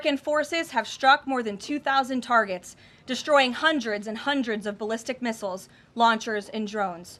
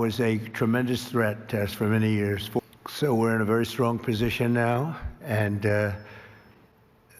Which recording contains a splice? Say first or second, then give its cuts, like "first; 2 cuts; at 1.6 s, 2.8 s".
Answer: second; 1 cut; at 2.6 s